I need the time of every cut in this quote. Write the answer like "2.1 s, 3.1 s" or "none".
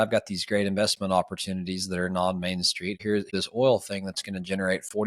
3.2 s